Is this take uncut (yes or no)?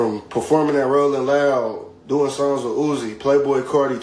yes